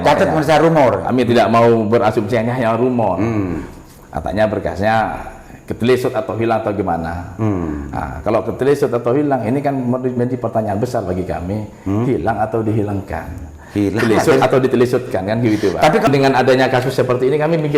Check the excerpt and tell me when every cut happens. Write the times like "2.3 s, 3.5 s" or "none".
16.1 s